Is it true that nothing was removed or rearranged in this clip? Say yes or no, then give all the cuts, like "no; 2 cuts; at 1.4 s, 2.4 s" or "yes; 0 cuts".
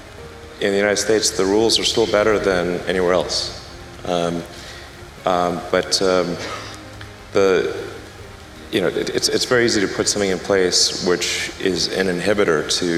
yes; 0 cuts